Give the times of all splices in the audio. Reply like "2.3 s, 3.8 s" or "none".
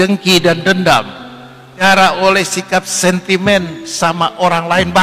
1.8 s